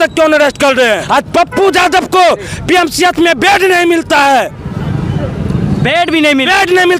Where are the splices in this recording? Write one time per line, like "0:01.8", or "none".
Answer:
0:01.0